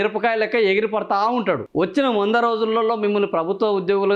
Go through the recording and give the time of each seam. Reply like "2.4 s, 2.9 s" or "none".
1.7 s